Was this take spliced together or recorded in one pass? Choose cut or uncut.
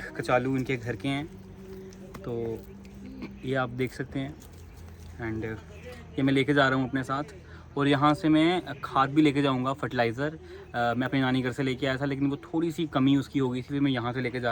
uncut